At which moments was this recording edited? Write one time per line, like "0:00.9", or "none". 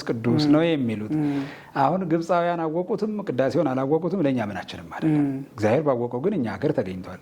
none